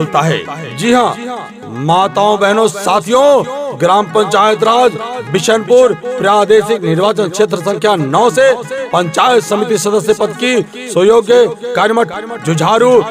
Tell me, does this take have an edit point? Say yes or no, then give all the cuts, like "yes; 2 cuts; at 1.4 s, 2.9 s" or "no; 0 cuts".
no; 0 cuts